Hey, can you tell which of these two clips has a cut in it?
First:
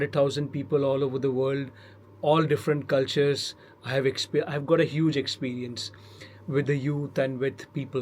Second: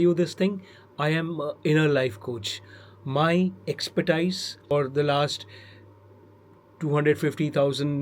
second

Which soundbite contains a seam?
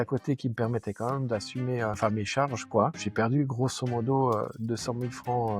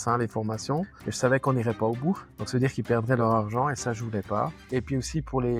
first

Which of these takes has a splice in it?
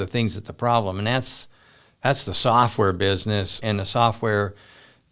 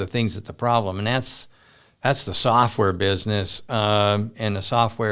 first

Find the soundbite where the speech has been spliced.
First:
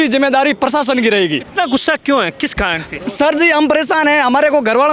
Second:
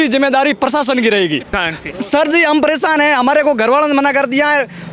second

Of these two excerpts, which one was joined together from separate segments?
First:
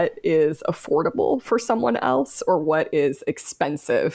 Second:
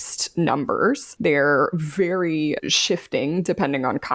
second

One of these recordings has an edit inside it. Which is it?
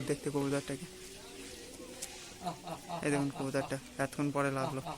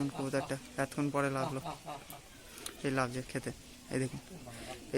first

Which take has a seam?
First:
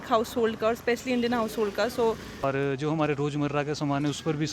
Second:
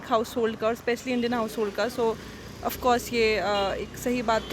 first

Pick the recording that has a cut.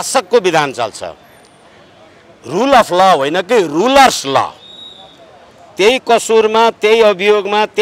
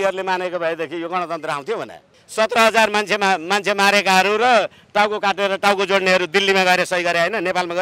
second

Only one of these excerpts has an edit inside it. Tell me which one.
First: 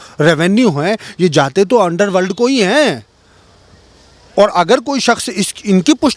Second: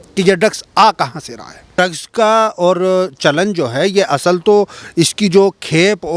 second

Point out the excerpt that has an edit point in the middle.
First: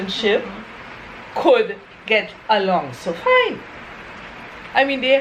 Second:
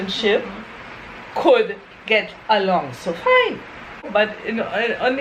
second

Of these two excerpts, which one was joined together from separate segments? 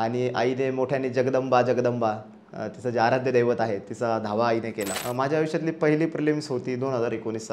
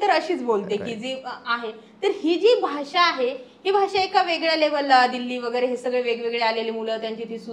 first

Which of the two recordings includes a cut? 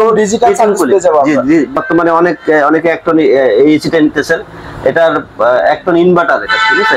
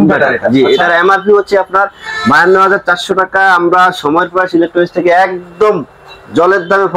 first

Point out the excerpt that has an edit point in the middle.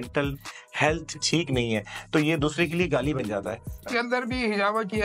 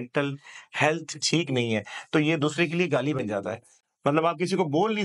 first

